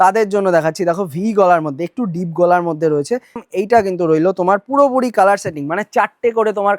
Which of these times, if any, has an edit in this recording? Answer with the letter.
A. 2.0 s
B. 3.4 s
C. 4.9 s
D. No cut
B